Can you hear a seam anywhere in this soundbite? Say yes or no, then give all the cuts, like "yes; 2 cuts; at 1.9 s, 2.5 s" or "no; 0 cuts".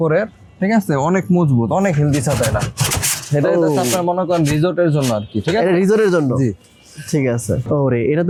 no; 0 cuts